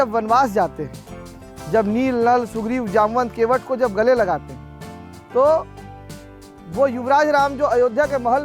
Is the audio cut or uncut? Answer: uncut